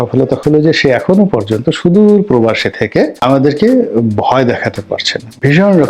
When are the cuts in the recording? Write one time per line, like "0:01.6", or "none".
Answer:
0:03.2